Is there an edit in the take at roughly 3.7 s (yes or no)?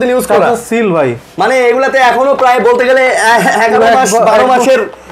no